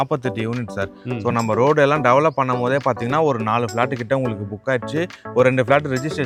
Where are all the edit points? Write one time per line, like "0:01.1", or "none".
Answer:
none